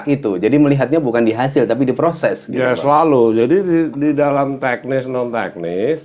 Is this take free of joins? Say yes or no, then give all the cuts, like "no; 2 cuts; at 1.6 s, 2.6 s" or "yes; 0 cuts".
yes; 0 cuts